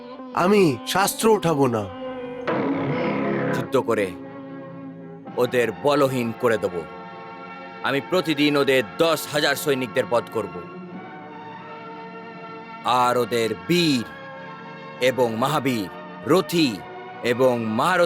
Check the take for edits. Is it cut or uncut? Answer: cut